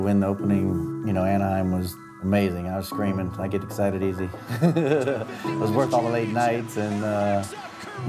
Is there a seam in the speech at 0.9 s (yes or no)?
yes